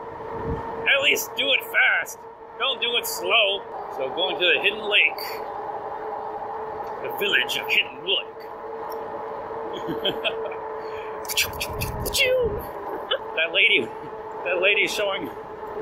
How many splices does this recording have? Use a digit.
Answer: 2